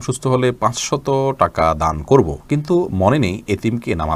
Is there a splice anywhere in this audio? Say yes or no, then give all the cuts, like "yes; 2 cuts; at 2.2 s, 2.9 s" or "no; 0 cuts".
no; 0 cuts